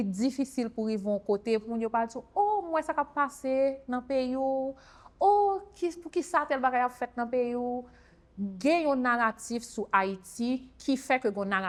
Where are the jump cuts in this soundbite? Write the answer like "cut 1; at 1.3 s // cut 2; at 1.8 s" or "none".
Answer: none